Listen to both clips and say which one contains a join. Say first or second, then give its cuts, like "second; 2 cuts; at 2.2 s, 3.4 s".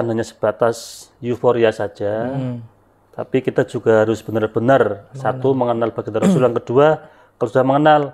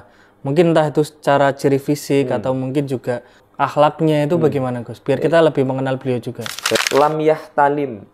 second; 2 cuts; at 3.4 s, 6.8 s